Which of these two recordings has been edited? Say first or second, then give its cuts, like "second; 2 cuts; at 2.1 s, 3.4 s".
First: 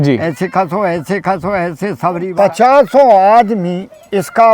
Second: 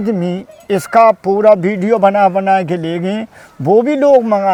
first; 1 cut; at 2.3 s